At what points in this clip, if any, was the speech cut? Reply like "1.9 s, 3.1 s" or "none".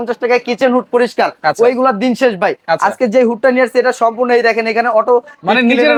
none